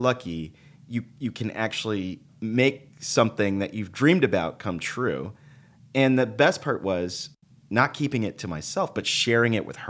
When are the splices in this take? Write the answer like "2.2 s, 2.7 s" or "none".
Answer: 2.2 s, 2.9 s, 7.3 s